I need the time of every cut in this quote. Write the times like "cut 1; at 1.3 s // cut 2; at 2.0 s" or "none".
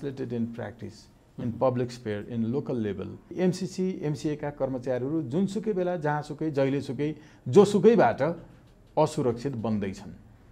cut 1; at 3.3 s